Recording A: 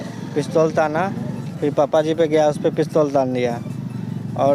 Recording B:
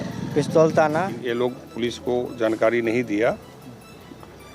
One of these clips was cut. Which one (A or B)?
B